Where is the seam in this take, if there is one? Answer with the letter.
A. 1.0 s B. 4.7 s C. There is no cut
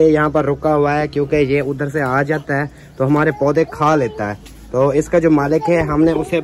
C